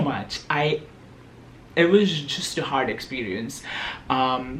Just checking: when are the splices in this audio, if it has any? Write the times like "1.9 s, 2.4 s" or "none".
none